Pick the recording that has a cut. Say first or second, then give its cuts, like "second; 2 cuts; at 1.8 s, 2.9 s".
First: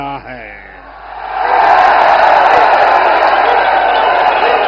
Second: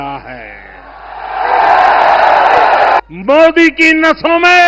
second; 1 cut; at 3.0 s